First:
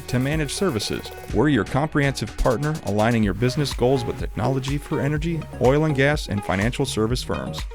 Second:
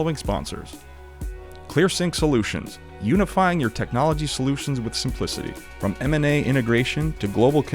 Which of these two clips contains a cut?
second; 1 cut; at 1.3 s

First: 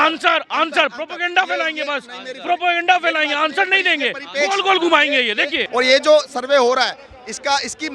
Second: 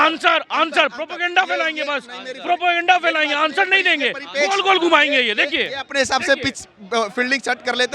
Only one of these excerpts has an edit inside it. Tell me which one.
first; 1 cut; at 5.6 s

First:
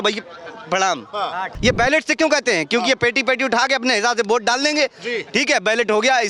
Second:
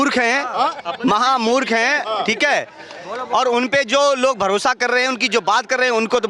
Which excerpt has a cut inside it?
first; 1 cut; at 1.5 s

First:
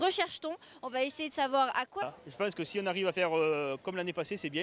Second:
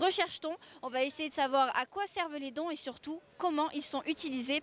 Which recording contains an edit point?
second; 1 cut; at 2.0 s

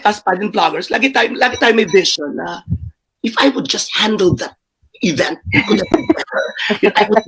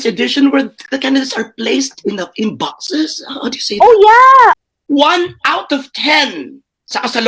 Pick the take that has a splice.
second; 1 cut; at 4.5 s

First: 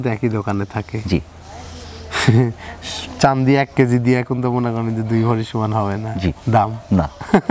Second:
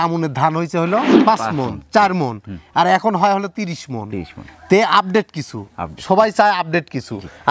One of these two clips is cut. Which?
second; 1 cut; at 1.1 s

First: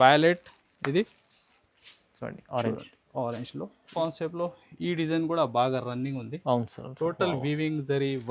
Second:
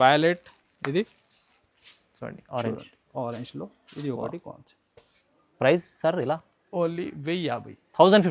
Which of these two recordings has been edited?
first; 1 cut; at 3.9 s

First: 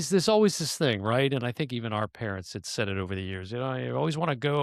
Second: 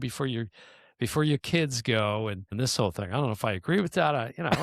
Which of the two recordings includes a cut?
second; 1 cut; at 2.5 s

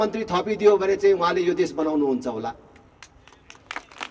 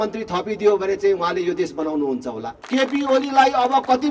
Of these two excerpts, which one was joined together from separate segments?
second; 1 cut; at 2.5 s

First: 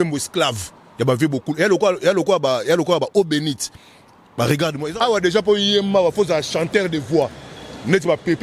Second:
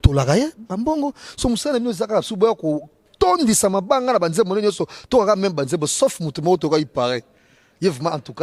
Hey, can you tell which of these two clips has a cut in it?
first; 1 cut; at 4.8 s

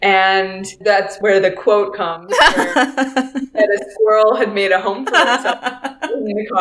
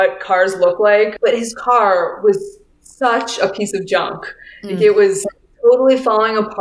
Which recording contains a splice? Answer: second; 1 cut; at 1.1 s

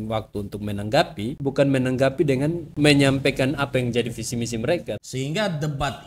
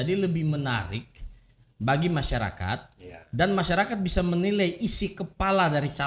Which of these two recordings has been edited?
first; 3 cuts; at 1.4 s, 2.6 s, 5.0 s

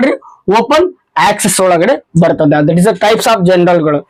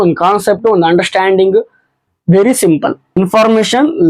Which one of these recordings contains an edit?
second; 1 cut; at 3.0 s

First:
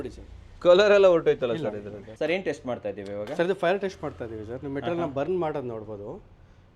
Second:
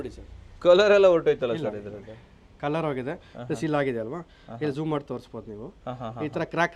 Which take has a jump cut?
first; 1 cut; at 2.2 s

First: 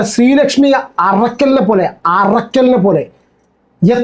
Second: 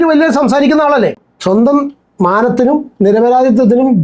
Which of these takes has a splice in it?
second; 1 cut; at 1.3 s

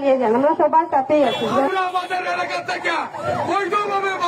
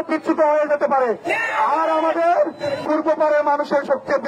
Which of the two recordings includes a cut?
first; 1 cut; at 1.7 s

